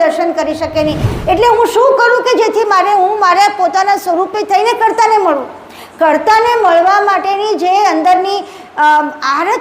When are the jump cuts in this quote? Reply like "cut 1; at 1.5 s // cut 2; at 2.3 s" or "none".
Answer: cut 1; at 1.1 s